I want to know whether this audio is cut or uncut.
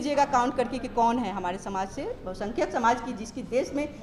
uncut